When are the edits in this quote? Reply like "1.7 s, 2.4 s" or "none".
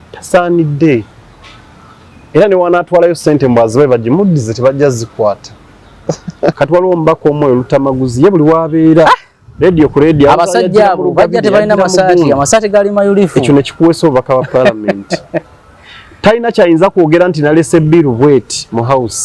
6.5 s